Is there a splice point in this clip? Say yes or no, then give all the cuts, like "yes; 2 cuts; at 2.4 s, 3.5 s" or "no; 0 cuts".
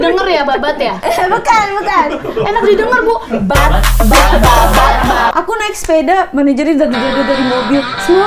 yes; 1 cut; at 5.3 s